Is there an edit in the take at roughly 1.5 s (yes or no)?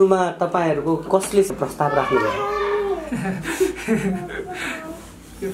yes